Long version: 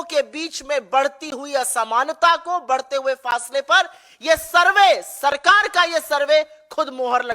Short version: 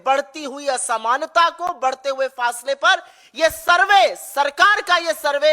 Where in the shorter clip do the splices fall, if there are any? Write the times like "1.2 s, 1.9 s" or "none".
none